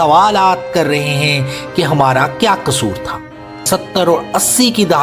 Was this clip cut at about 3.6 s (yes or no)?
yes